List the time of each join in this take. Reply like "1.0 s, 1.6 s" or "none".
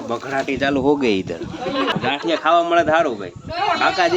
1.9 s